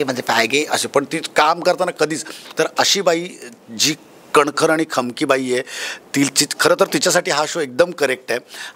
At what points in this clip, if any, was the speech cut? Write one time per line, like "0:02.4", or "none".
none